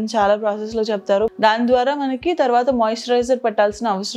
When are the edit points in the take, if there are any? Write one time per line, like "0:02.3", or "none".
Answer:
0:01.3